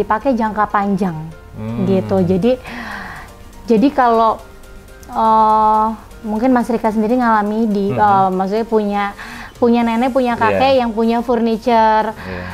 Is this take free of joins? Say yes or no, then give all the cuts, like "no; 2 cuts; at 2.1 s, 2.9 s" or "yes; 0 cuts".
yes; 0 cuts